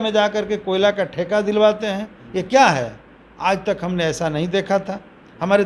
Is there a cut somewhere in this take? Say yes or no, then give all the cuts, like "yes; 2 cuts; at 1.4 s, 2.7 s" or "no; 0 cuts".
no; 0 cuts